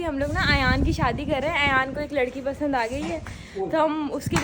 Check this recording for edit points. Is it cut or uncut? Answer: uncut